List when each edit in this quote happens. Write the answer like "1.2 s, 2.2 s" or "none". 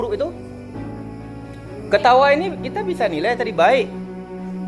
none